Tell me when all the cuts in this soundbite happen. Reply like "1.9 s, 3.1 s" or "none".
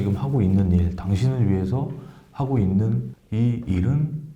3.1 s